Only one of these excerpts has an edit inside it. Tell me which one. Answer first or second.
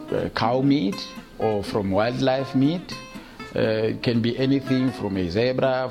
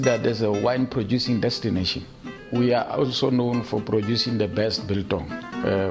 second